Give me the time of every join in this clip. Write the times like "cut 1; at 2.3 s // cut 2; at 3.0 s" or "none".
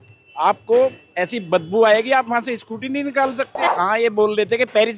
cut 1; at 3.6 s